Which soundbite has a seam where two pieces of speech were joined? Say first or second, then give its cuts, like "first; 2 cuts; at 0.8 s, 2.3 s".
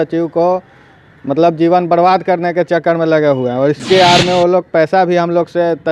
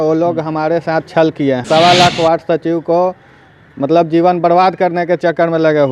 second; 1 cut; at 1.6 s